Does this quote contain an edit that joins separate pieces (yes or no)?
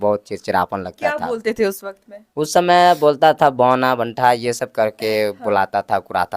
no